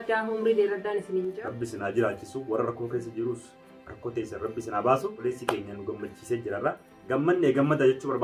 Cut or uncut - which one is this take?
cut